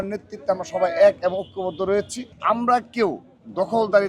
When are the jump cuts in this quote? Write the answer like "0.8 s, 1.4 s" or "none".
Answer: 2.3 s